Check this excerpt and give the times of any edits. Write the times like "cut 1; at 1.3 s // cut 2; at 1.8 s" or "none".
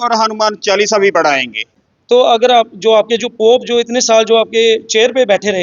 cut 1; at 1.8 s